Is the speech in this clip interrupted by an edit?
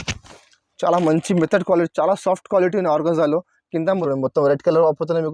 yes; 1 cut; at 4.0 s

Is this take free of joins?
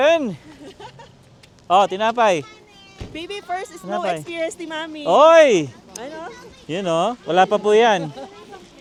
yes; 0 cuts

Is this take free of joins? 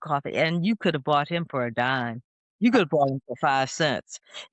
yes; 0 cuts

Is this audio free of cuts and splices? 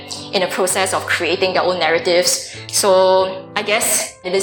no; 2 cuts; at 2.6 s, 3.7 s

